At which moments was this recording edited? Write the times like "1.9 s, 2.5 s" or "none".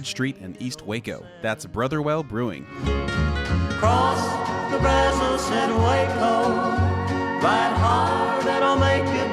2.7 s